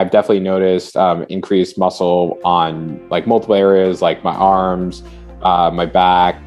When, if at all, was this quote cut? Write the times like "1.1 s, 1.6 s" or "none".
none